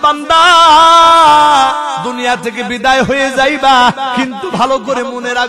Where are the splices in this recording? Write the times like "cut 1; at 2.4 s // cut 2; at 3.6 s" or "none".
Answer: cut 1; at 2.1 s // cut 2; at 4.2 s